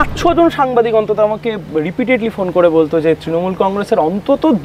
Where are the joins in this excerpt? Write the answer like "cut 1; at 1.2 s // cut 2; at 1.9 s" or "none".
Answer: none